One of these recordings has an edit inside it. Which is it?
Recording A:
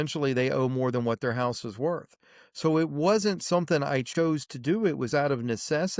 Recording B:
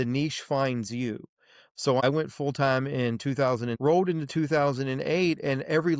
B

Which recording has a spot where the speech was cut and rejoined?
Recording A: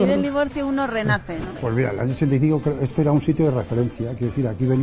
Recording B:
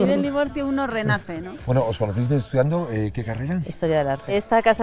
A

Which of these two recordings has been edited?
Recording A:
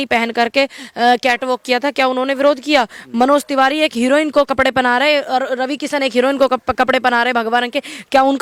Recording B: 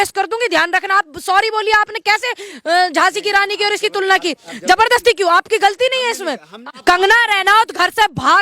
B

